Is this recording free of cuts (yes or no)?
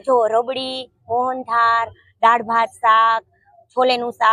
yes